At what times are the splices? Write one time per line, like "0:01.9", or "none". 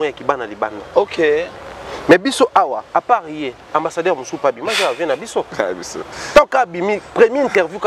none